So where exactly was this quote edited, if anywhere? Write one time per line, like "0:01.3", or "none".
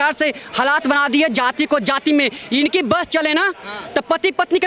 none